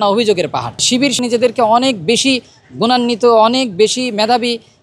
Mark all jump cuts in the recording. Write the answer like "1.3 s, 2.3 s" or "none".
1.2 s